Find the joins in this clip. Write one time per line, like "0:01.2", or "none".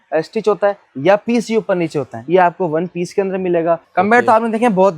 0:02.2
0:03.9